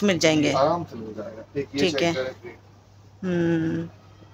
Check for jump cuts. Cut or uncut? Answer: uncut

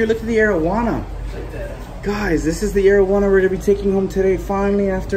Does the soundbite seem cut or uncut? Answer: uncut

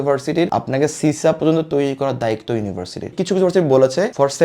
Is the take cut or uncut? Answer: cut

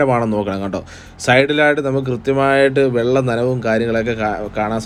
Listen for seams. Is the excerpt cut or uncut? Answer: uncut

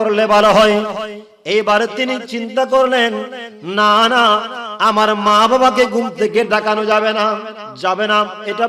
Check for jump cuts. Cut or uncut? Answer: cut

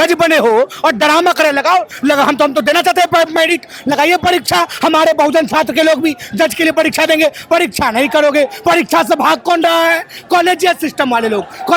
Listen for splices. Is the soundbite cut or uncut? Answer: uncut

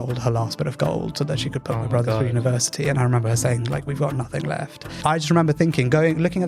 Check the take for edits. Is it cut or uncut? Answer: cut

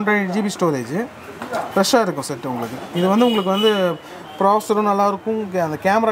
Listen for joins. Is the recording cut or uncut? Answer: uncut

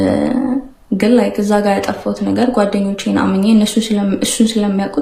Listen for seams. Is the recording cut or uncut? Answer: uncut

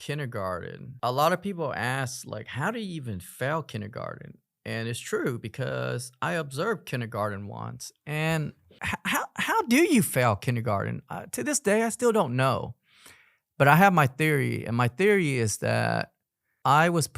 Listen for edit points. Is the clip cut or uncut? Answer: cut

